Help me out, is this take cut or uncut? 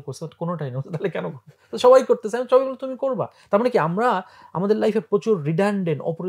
uncut